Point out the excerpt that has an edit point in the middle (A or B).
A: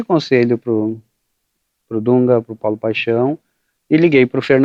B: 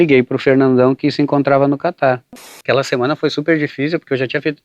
B